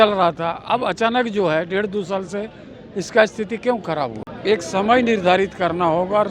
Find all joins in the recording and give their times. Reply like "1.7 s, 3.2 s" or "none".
4.2 s